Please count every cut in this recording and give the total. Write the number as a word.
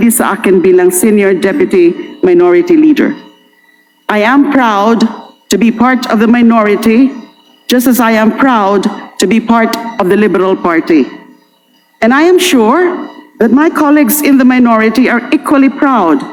zero